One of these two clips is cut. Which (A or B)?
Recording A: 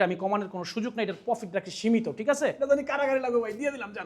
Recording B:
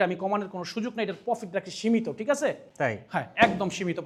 A